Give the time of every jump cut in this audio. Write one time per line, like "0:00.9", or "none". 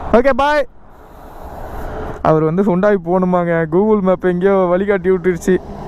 0:02.1